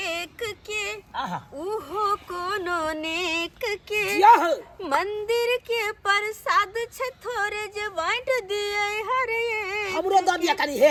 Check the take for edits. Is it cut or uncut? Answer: uncut